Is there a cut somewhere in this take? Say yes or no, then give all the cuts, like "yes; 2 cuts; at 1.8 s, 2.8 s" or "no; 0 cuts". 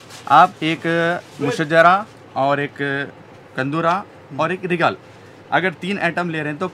no; 0 cuts